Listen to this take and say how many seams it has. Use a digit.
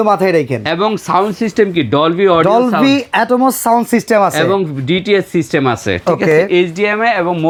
0